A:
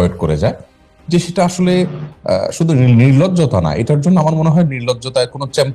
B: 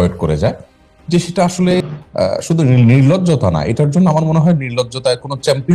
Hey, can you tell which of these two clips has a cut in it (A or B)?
B